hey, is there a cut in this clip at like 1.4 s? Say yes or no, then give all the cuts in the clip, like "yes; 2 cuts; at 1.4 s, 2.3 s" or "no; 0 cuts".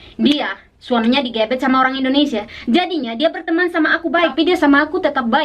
no; 1 cut; at 4.3 s